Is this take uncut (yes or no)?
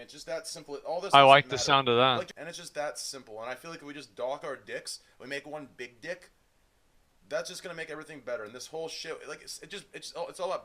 no